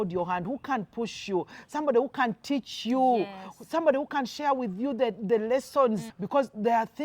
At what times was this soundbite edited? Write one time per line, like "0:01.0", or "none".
0:06.1